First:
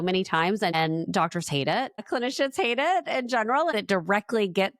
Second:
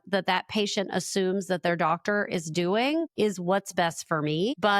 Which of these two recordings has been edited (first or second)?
first